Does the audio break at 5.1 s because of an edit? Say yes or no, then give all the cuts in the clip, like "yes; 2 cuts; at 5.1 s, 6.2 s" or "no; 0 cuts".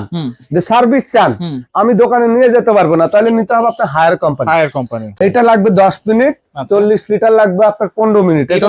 yes; 1 cut; at 5.1 s